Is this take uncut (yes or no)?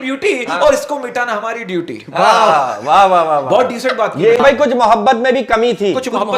no